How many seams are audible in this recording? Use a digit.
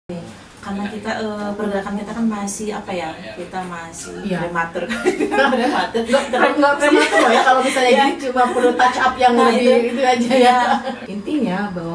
1